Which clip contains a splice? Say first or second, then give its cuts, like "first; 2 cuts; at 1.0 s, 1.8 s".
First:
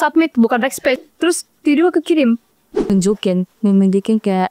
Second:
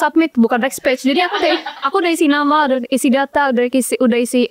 first; 2 cuts; at 1.0 s, 2.9 s